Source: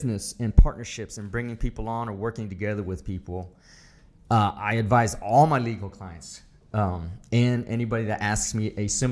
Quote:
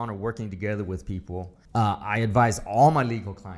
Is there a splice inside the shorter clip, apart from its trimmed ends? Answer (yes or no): yes